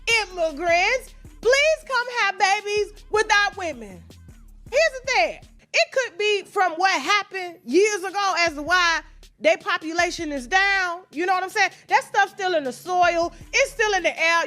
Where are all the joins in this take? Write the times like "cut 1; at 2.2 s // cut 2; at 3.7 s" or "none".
cut 1; at 5.6 s